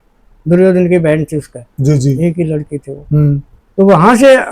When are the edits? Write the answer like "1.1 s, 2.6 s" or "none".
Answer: none